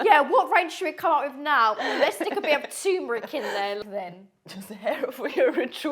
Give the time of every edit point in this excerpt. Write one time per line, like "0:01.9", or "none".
0:03.8